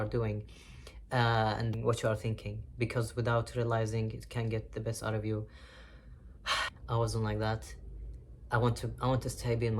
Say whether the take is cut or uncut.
cut